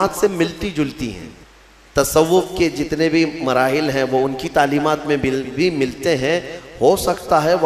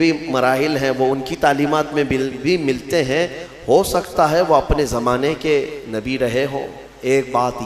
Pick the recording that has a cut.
first; 1 cut; at 1.5 s

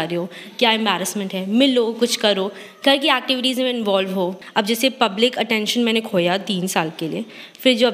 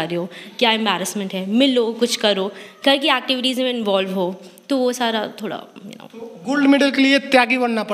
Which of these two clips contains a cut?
first; 1 cut; at 4.4 s

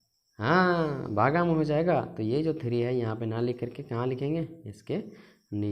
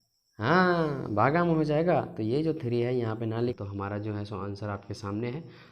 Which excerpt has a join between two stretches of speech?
second; 1 cut; at 3.6 s

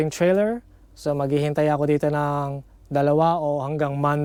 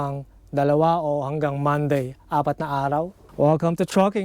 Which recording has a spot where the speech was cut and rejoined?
second; 1 cut; at 3.2 s

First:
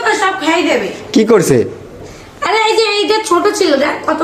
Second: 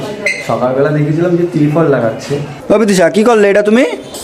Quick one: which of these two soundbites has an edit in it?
second; 1 cut; at 2.5 s

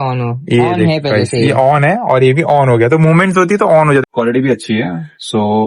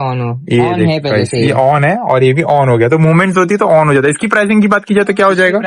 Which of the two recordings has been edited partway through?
first; 1 cut; at 4.0 s

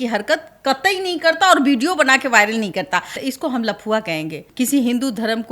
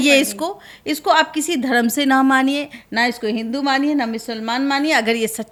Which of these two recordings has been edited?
first; 2 cuts; at 3.2 s, 4.4 s

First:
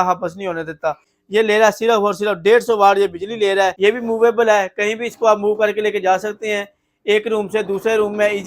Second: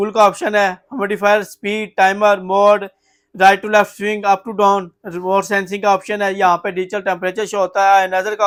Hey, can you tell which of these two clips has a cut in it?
first; 2 cuts; at 1.1 s, 3.7 s

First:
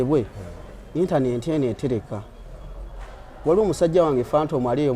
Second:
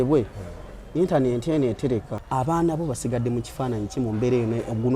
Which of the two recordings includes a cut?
second; 1 cut; at 2.2 s

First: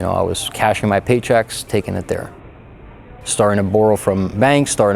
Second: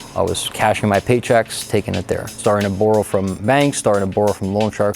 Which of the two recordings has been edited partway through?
second; 1 cut; at 2.3 s

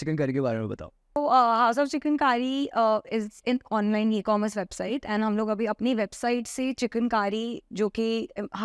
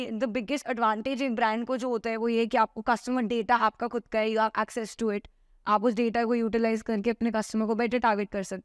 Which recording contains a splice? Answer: first; 1 cut; at 1.2 s

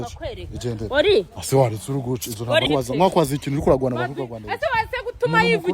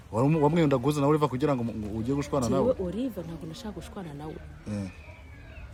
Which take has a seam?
first; 1 cut; at 2.7 s

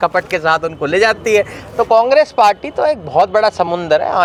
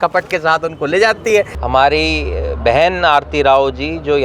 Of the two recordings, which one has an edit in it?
second; 1 cut; at 1.2 s

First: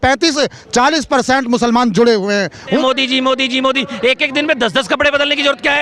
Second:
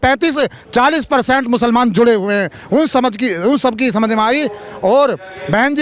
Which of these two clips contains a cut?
first; 1 cut; at 2.8 s

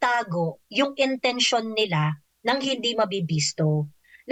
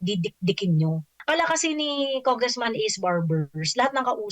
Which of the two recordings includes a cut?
second; 1 cut; at 1.1 s

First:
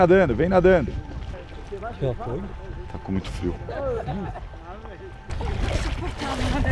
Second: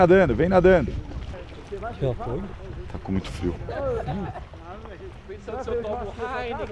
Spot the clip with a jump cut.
first; 1 cut; at 5.3 s

